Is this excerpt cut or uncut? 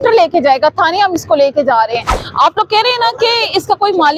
uncut